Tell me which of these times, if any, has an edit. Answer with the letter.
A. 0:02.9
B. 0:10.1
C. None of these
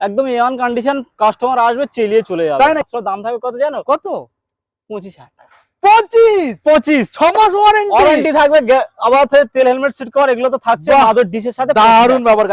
A